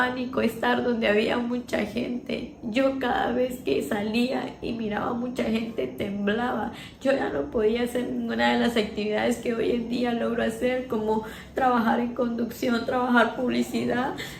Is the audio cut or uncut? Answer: uncut